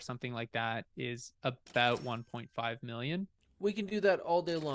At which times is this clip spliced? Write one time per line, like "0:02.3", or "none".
0:03.4